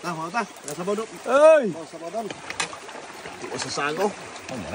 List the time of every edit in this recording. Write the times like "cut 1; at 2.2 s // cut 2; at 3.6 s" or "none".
cut 1; at 2.3 s